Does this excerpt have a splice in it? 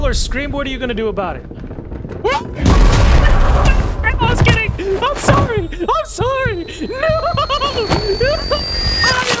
no; 0 cuts

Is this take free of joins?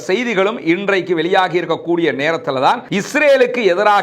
no; 1 cut; at 2.8 s

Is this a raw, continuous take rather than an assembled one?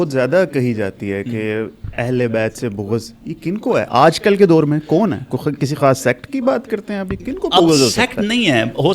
yes; 0 cuts

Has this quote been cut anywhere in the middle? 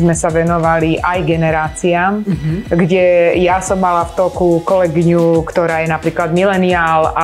no; 0 cuts

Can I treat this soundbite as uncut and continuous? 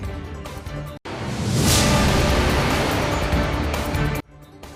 yes; 0 cuts

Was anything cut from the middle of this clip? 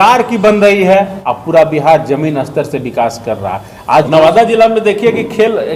yes; 2 cuts; at 1.2 s, 4.1 s

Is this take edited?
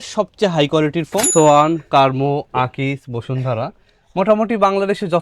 yes; 1 cut; at 1.3 s

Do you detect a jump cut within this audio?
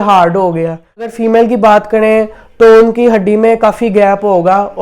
yes; 1 cut; at 1.1 s

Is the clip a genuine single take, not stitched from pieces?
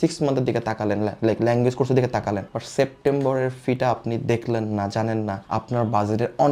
yes; 0 cuts

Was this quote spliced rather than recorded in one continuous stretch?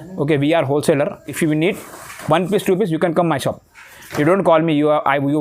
yes; 1 cut; at 1.3 s

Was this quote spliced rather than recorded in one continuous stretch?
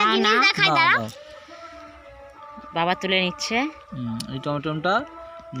no; 0 cuts

